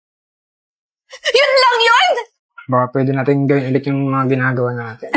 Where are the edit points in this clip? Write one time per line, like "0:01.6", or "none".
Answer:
0:02.3